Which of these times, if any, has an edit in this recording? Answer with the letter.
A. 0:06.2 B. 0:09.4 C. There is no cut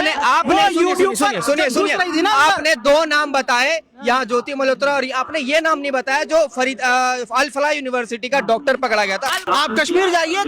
B